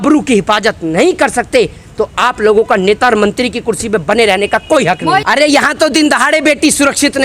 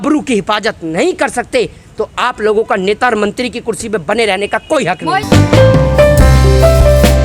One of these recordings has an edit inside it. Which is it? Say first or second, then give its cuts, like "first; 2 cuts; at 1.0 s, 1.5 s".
first; 1 cut; at 5.2 s